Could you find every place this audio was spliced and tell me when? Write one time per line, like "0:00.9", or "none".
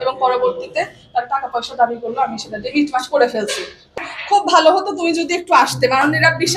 0:03.9

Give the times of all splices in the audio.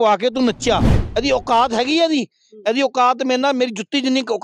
0:01.0

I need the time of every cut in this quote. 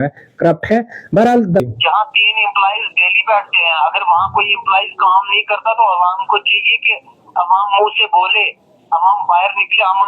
0:01.6

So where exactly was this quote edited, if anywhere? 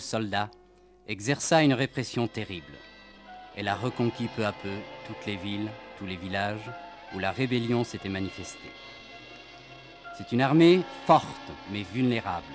0:09.6

